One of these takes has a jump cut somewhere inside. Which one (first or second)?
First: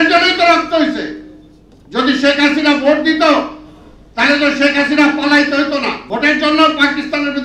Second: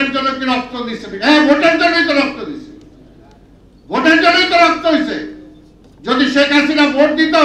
first